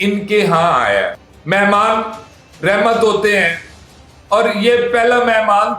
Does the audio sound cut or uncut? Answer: uncut